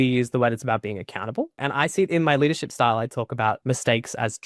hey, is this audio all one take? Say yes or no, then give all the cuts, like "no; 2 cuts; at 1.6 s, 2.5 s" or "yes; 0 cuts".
no; 2 cuts; at 1.7 s, 3.6 s